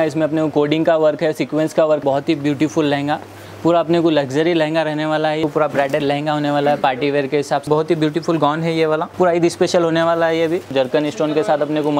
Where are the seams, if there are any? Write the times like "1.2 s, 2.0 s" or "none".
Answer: 2.0 s, 5.4 s, 7.6 s, 9.1 s, 10.7 s